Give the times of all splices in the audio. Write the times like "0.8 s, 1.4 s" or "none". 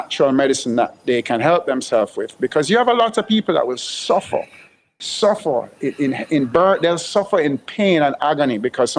none